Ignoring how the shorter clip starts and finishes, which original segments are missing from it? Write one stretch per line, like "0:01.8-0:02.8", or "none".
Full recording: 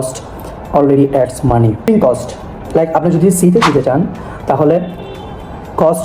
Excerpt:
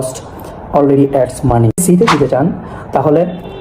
0:01.8-0:03.4

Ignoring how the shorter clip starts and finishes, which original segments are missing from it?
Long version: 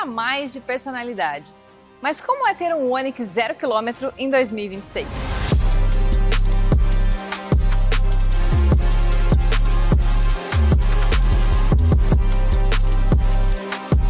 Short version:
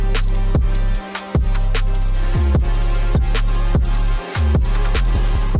none

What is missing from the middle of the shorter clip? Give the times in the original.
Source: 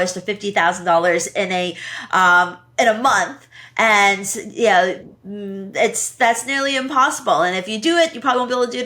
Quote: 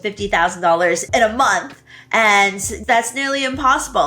0:01.3-0:02.7
0:04.4-0:06.0

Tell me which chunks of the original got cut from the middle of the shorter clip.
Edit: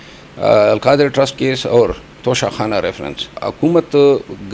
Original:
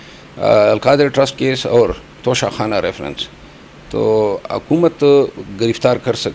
0:03.4-0:04.4

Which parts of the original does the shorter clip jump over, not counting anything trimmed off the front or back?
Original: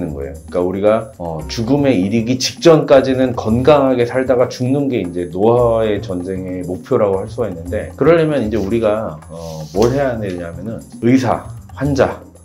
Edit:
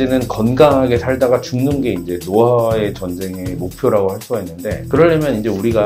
none

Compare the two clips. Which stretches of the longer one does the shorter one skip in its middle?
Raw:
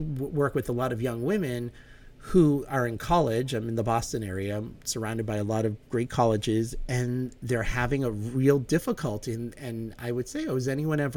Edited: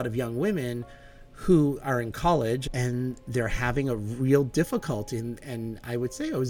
0:03.5-0:06.8

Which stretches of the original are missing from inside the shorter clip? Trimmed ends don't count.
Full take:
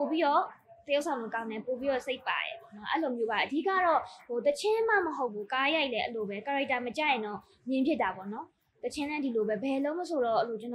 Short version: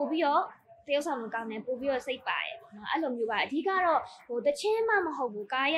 none

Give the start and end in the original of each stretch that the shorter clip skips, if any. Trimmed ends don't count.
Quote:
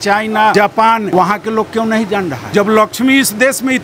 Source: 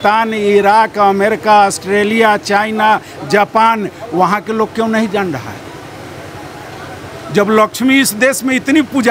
0:03.2-0:03.8
0:05.4-0:07.2

